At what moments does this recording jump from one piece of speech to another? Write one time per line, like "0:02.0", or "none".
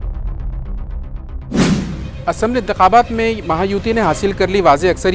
none